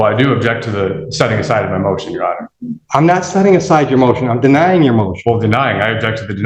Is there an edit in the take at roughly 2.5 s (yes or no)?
no